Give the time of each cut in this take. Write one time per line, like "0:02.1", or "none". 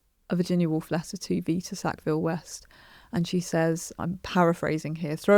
0:04.0

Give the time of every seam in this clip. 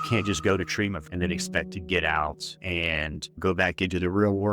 0:01.0
0:02.5

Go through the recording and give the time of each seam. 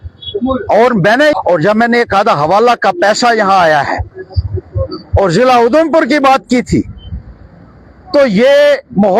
0:01.3

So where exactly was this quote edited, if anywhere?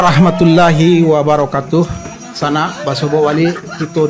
none

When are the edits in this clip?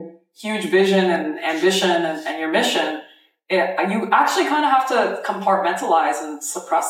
none

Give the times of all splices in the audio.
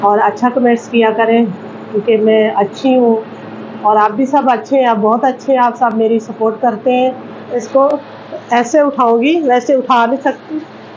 0:07.6

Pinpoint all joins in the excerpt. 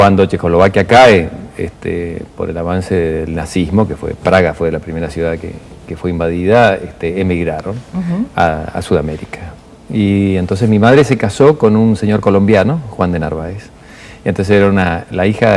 0:08.5

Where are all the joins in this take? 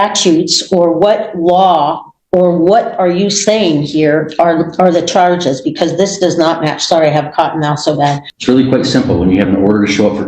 0:08.3

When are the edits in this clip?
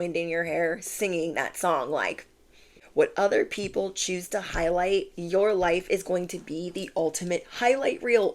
0:02.8

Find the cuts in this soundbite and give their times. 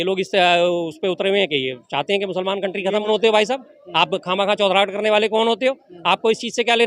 0:03.1

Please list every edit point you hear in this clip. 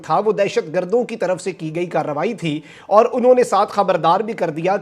none

